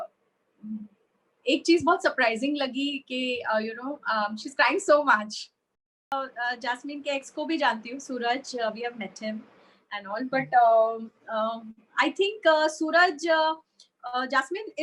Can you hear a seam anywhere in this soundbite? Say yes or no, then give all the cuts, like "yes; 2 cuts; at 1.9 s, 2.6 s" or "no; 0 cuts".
yes; 1 cut; at 6.1 s